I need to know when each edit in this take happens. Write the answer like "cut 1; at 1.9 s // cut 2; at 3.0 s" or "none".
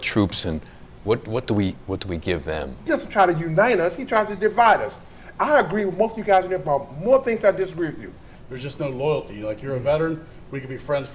cut 1; at 2.9 s // cut 2; at 8.2 s